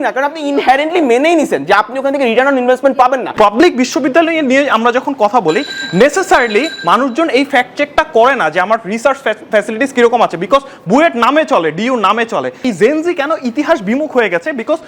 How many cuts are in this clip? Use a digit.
2